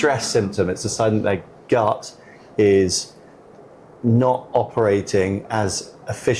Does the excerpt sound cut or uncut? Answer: uncut